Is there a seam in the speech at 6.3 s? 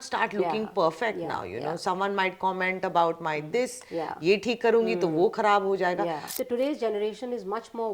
yes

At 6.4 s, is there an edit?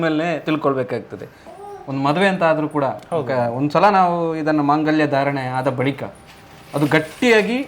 no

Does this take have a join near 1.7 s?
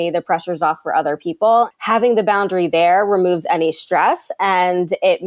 yes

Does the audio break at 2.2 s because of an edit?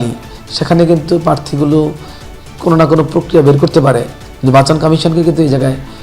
no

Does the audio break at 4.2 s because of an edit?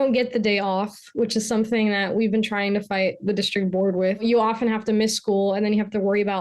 yes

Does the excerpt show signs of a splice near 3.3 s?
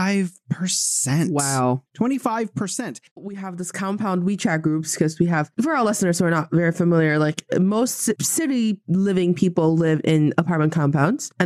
yes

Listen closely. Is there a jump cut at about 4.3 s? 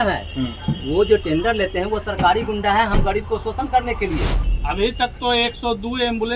yes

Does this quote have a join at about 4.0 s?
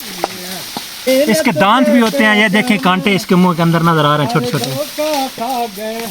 no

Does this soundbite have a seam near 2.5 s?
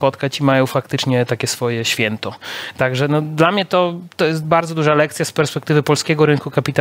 no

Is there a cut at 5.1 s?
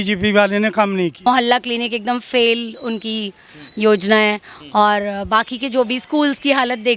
no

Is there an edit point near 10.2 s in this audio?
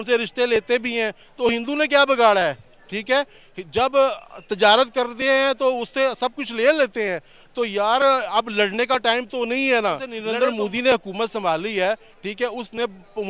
yes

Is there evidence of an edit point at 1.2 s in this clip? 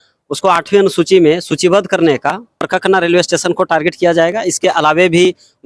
no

